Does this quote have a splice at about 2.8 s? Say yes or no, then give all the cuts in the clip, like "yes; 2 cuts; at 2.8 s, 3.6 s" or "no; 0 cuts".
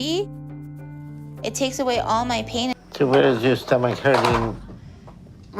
yes; 1 cut; at 2.8 s